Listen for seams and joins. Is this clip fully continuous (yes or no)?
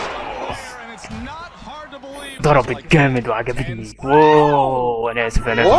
no